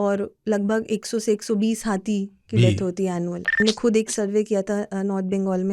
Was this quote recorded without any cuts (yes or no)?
no